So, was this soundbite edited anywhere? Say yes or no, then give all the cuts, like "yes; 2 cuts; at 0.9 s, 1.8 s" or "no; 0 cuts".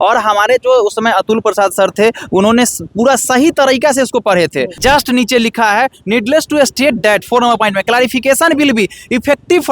yes; 1 cut; at 4.8 s